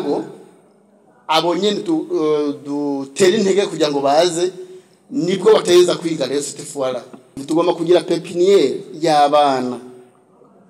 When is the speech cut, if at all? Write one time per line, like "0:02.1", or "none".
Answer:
0:07.4